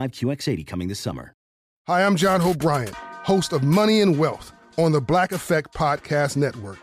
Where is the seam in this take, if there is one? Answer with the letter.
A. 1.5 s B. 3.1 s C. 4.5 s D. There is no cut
A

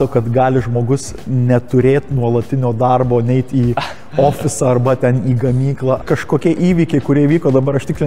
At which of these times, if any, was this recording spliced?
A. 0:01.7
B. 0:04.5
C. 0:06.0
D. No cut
C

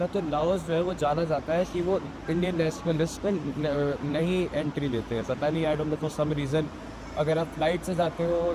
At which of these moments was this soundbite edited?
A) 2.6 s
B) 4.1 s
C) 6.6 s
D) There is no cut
D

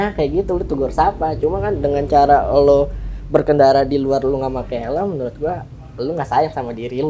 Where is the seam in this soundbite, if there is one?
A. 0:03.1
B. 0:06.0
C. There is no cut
C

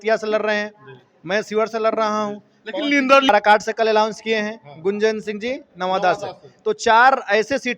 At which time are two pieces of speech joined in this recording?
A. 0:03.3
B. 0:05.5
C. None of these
A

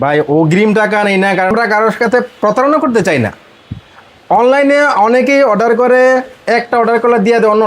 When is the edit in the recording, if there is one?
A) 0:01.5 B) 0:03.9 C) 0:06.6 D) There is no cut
A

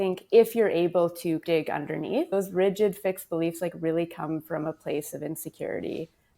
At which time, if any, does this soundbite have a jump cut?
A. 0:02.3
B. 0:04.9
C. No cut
A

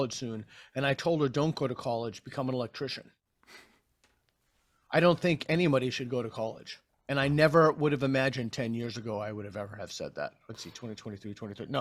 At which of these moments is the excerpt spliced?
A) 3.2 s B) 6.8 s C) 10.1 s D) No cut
D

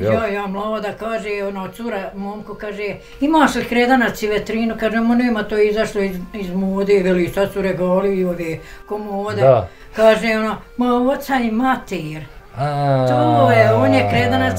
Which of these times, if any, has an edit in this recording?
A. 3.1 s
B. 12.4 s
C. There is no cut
C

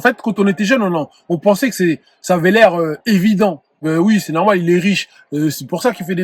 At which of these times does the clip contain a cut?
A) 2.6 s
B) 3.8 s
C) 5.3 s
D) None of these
B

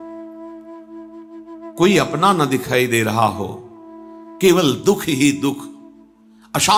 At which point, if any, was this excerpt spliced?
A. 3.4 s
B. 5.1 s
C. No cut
C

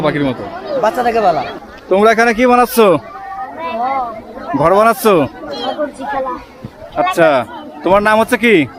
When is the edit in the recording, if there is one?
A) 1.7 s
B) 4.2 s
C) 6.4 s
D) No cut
A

